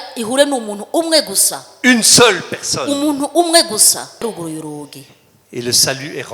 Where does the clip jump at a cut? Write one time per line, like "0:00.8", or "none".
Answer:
0:04.2